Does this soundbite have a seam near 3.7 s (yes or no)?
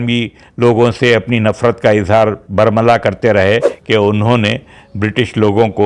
yes